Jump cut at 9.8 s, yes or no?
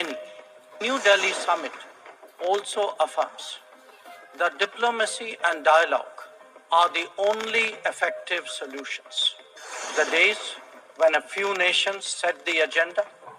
yes